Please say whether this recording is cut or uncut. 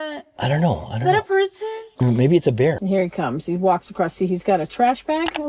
cut